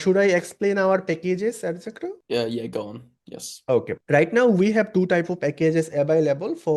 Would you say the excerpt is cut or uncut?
uncut